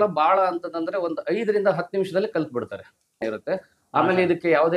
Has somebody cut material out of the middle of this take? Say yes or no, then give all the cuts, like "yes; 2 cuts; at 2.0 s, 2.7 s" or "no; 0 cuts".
yes; 1 cut; at 3.2 s